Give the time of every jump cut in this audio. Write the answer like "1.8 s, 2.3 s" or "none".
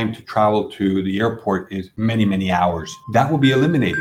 1.8 s, 2.9 s